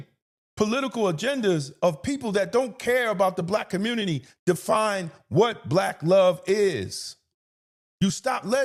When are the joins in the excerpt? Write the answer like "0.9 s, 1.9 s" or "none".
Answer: none

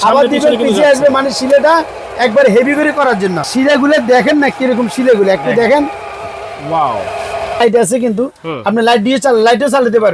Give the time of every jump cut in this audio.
3.5 s, 7.6 s

